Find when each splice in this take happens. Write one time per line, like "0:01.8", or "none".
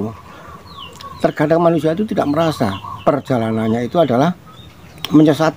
0:03.3